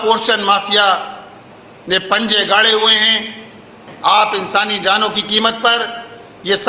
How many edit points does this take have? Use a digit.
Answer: 1